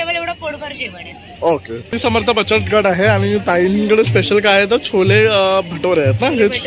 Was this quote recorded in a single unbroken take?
yes; 0 cuts

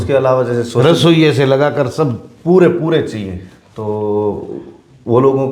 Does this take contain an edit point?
no; 0 cuts

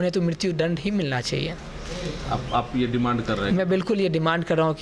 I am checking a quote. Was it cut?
no; 0 cuts

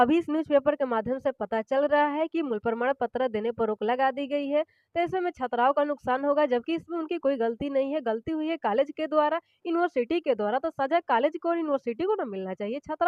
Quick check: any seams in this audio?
no; 0 cuts

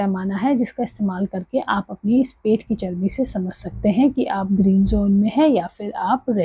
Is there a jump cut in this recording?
no; 0 cuts

